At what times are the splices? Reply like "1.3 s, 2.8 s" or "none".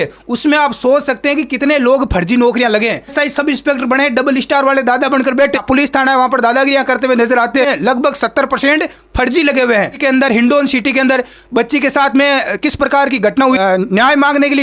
3.1 s, 5.6 s, 7.6 s, 10.0 s, 13.6 s